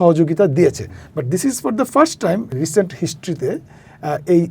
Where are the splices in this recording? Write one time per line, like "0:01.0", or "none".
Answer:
0:02.5